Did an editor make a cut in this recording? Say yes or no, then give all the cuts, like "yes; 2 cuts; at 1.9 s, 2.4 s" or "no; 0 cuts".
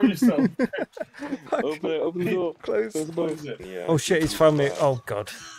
yes; 1 cut; at 3.6 s